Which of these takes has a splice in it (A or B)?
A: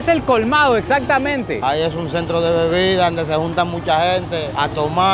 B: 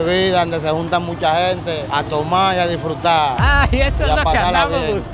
A